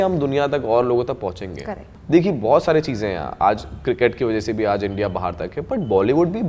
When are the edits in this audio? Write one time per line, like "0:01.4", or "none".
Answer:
none

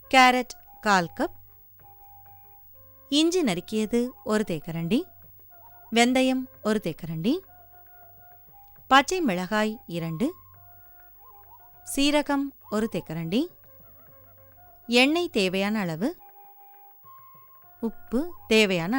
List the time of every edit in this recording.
0:16.2
0:17.5

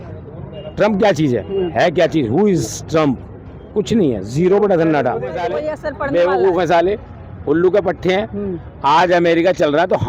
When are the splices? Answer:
0:05.7

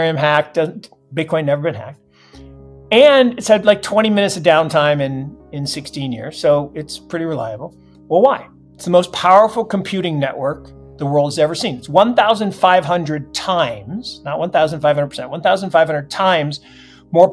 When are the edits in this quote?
none

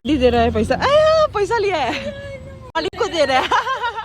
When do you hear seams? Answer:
0:02.7

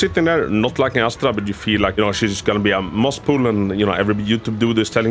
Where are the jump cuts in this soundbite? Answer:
0:01.9

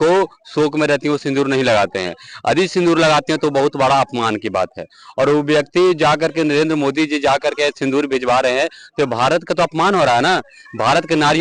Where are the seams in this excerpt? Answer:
none

